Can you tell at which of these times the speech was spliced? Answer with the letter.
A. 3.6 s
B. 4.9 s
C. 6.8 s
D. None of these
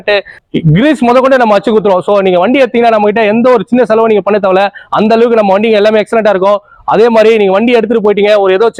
D